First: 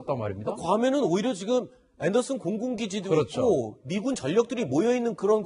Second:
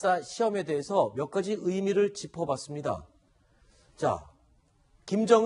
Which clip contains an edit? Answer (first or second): first